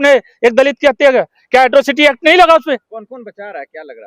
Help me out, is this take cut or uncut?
cut